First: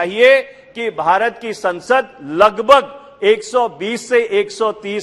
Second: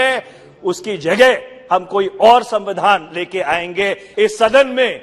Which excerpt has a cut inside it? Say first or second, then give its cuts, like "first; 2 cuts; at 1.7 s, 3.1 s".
second; 1 cut; at 4.0 s